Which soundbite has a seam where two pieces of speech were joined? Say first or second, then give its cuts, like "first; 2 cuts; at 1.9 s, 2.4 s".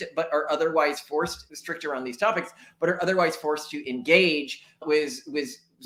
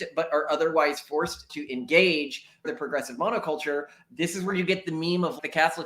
second; 2 cuts; at 1.5 s, 2.7 s